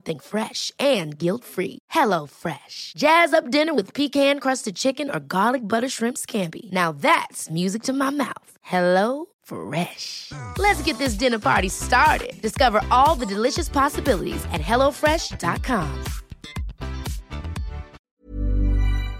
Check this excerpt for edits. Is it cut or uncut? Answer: cut